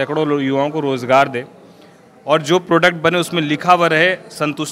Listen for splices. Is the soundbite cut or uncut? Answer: uncut